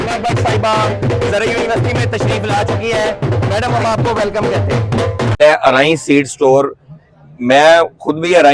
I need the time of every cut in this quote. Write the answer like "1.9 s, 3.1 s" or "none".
5.4 s

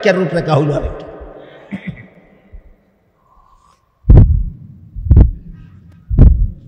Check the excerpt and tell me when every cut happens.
none

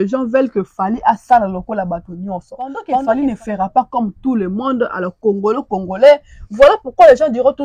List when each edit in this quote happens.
2.9 s

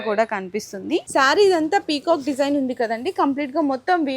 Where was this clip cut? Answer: 1.1 s

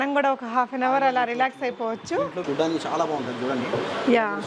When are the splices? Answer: 2.4 s

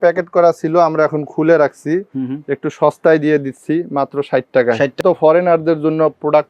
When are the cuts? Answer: 5.0 s

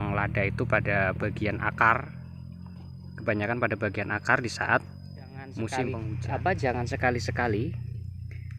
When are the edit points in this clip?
6.1 s

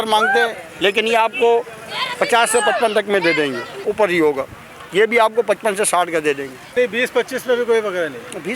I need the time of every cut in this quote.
3.8 s, 6.8 s

